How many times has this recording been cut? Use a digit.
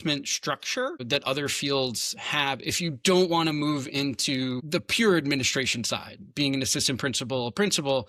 0